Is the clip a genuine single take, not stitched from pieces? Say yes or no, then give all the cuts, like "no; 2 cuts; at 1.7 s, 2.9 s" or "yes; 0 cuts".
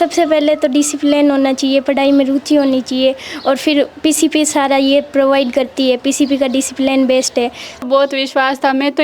no; 1 cut; at 7.8 s